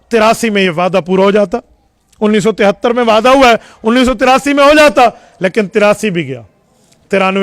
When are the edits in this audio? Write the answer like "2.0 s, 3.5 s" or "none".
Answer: none